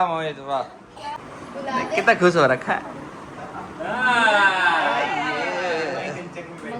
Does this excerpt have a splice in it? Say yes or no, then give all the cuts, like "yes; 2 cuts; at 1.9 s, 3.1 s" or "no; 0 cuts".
yes; 1 cut; at 1.3 s